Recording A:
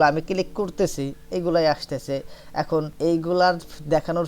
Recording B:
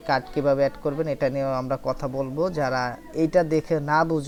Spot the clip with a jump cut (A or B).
A